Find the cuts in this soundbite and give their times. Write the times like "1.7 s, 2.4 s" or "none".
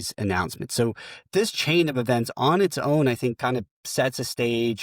none